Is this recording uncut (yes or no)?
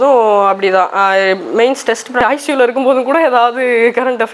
no